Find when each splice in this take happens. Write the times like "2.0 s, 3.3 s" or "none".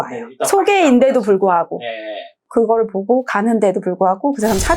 2.5 s